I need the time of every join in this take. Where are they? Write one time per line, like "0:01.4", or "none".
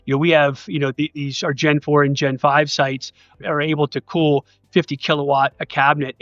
0:03.4